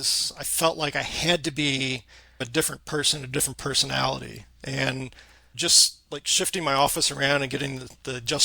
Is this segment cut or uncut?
cut